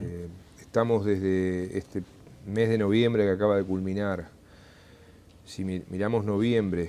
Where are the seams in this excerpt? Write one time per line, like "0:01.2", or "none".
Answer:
0:00.9